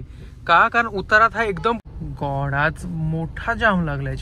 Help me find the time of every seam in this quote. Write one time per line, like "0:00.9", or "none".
0:01.8